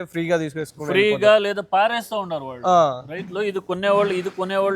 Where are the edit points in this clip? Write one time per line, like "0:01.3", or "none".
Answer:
none